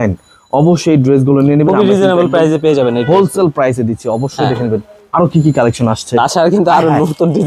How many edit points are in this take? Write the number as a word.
zero